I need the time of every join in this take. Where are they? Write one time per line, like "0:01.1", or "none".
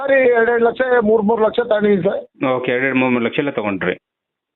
none